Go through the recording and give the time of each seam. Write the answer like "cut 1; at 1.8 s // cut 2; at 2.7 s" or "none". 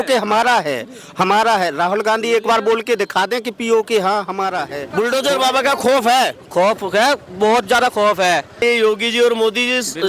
cut 1; at 4.8 s // cut 2; at 8.6 s